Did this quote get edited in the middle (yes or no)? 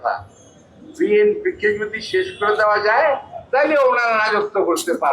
no